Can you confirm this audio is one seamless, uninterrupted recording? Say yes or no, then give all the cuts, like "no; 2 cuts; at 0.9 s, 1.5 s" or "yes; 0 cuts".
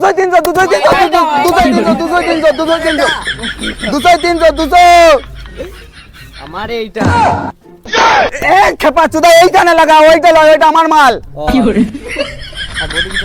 yes; 0 cuts